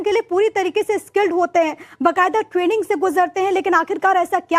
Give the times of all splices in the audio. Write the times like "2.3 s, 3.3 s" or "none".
none